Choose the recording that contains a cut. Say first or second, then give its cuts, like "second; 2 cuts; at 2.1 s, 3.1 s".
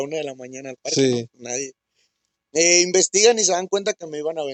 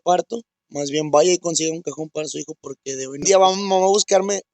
second; 1 cut; at 3.2 s